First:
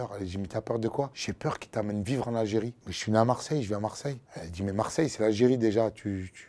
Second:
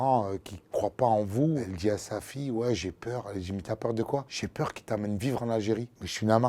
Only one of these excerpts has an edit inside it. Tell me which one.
second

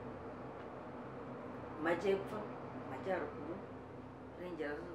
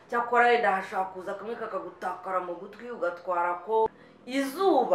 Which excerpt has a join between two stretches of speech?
second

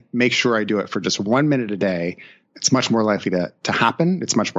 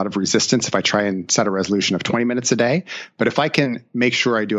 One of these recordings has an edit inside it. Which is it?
first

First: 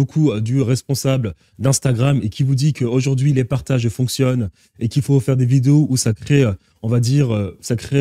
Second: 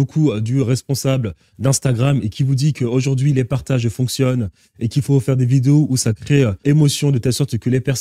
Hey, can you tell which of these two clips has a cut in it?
second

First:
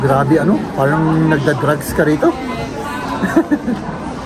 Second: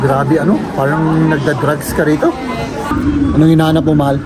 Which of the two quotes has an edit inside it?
second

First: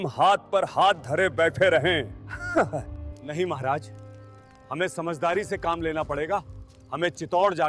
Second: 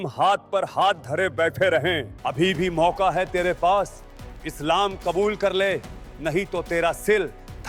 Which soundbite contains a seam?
second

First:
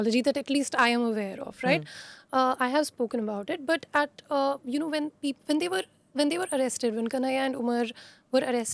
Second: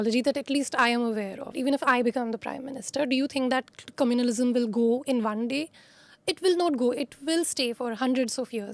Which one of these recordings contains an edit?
second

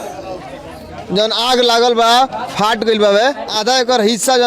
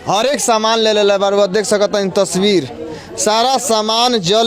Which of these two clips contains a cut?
first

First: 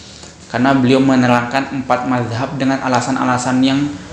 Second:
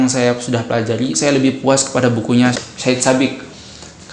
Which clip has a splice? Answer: second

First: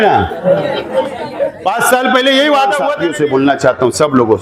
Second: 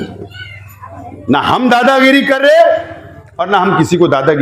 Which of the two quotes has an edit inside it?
first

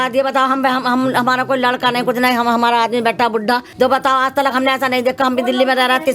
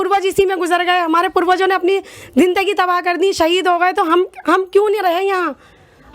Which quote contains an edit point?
first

